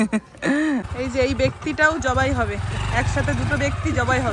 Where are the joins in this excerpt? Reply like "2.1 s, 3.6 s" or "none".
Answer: 0.9 s